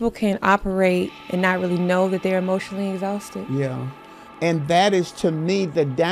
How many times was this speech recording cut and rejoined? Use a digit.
2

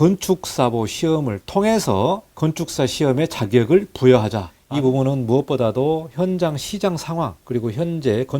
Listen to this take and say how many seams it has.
1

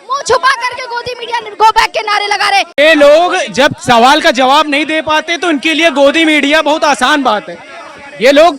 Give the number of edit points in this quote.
1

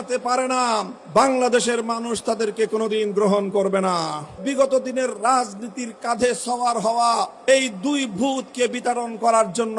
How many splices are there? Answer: 3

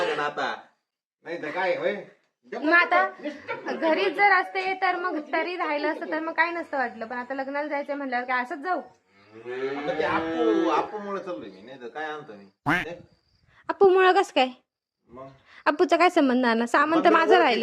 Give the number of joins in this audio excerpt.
0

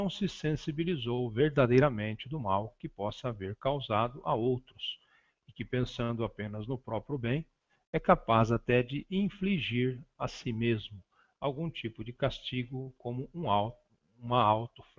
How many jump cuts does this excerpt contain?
1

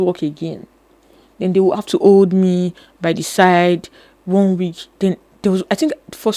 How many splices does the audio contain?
0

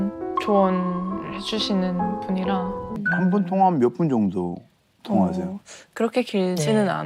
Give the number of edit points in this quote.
1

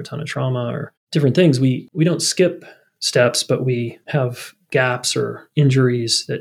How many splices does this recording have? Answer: 2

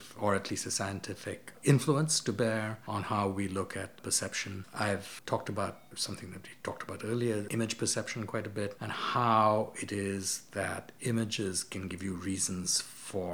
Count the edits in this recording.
0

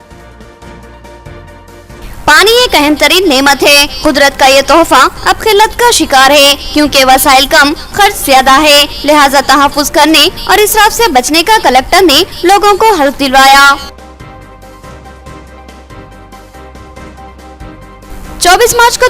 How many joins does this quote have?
1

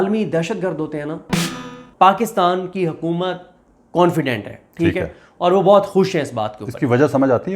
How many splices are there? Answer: 1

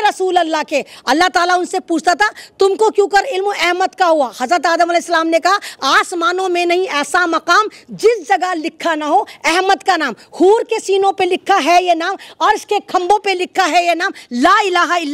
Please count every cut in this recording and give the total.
0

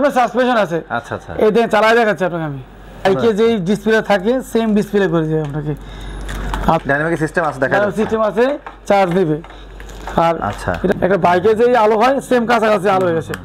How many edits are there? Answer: 3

